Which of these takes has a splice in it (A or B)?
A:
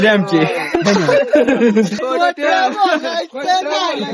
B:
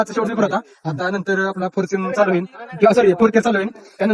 A